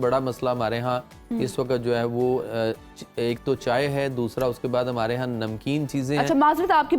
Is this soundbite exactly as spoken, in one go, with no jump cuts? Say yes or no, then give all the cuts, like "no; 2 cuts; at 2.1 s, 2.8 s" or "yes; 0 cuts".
yes; 0 cuts